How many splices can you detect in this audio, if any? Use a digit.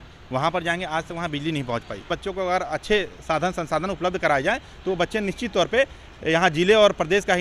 1